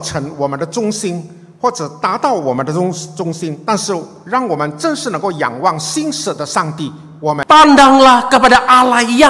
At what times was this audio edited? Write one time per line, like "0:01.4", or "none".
0:07.4